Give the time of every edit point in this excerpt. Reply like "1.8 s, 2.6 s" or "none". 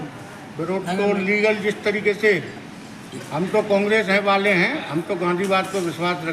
none